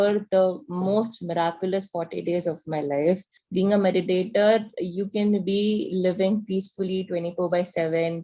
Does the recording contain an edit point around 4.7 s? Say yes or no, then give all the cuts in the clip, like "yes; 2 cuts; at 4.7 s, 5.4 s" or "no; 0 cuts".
no; 1 cut; at 3.3 s